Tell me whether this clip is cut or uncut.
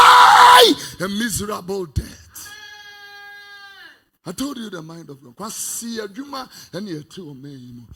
uncut